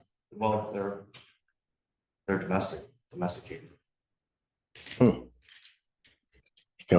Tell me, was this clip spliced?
no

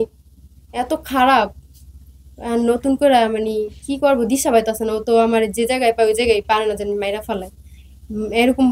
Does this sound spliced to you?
no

